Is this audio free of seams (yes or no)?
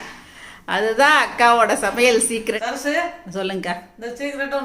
no